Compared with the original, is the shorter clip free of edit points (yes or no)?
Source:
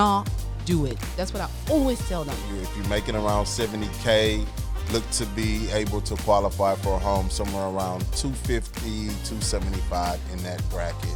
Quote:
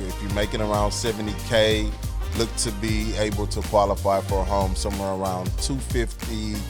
yes